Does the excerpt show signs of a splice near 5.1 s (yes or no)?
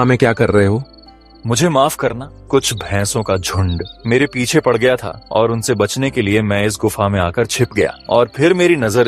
yes